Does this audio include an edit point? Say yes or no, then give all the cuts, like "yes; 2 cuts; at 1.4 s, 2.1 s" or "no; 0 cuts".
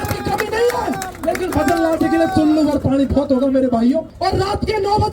yes; 1 cut; at 4.1 s